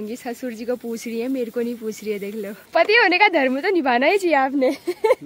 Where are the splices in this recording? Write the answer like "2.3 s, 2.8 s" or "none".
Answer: 2.6 s